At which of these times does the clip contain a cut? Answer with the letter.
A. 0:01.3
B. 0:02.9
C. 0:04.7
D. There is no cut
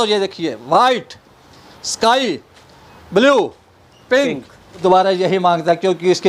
C